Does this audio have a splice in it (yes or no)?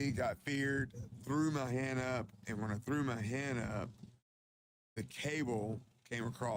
no